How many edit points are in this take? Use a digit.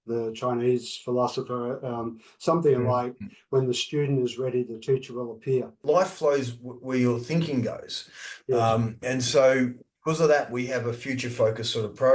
1